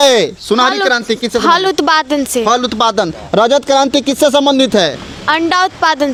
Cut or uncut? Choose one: uncut